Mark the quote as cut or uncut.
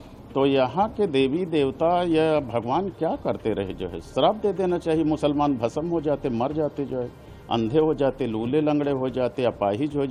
uncut